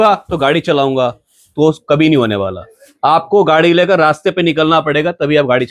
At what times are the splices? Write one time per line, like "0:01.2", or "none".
none